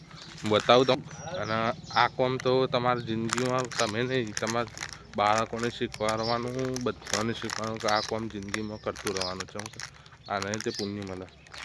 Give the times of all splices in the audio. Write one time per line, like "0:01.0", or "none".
0:01.0